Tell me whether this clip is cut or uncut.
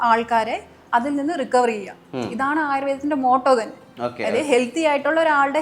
uncut